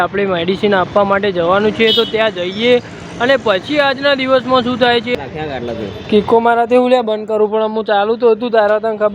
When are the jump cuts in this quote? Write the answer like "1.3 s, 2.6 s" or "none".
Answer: 5.1 s